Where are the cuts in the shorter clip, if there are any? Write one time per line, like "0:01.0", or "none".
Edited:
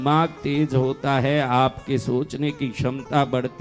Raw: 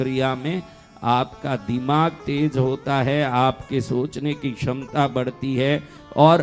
none